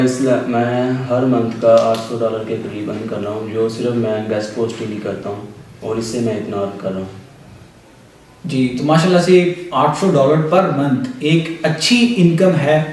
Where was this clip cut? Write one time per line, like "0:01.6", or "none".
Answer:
none